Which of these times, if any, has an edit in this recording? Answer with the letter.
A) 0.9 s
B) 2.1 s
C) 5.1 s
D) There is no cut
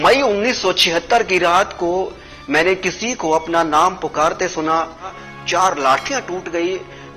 C